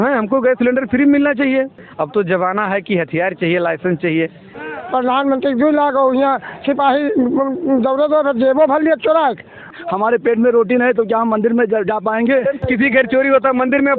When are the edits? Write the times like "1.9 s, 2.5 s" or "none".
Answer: 1.8 s, 4.5 s, 9.7 s, 12.6 s